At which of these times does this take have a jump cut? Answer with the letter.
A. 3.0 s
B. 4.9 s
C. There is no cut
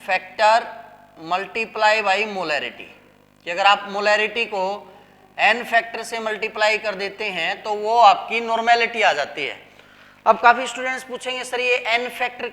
C